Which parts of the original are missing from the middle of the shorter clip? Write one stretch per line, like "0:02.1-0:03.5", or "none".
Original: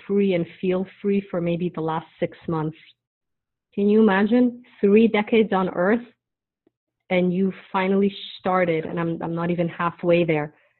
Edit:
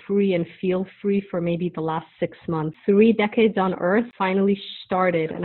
0:02.7-0:04.7
0:06.1-0:07.7